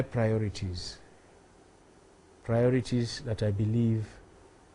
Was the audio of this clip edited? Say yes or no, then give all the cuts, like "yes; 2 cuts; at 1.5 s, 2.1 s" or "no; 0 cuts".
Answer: yes; 1 cut; at 1.5 s